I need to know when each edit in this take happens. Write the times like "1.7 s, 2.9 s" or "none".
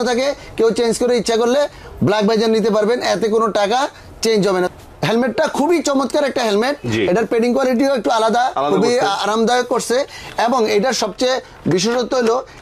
4.7 s

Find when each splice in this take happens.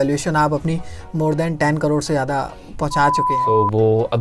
3.3 s

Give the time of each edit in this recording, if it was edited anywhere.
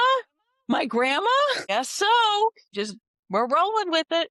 1.6 s, 2.6 s

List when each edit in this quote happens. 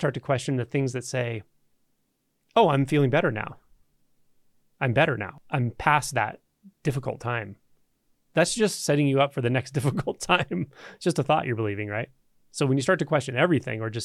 5.4 s

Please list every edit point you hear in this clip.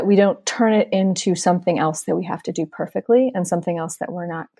none

